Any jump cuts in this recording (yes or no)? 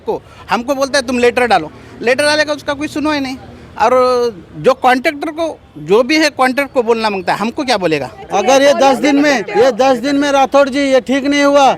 yes